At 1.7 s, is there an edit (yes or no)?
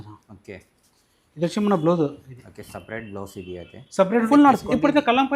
no